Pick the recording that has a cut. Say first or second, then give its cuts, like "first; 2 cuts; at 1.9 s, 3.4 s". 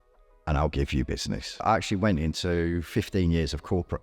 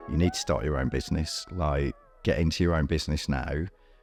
first; 1 cut; at 1.6 s